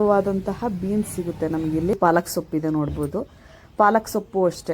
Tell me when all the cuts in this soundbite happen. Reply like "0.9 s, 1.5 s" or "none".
1.9 s